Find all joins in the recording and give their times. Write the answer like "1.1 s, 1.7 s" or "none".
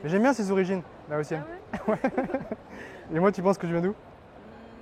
none